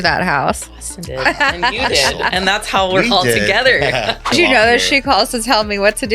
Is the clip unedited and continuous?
no; 1 cut; at 4.3 s

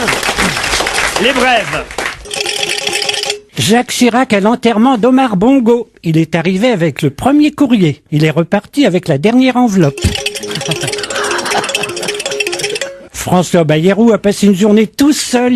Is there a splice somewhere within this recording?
yes; 1 cut; at 6.4 s

